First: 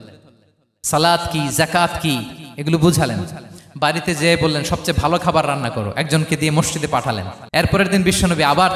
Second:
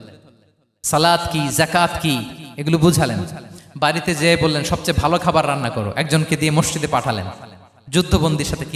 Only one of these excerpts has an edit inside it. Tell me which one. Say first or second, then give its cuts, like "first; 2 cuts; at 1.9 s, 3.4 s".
first; 1 cut; at 7.3 s